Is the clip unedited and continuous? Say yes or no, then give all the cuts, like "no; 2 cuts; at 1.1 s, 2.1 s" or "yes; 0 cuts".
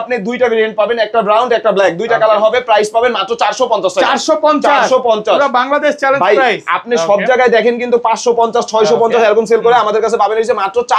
yes; 0 cuts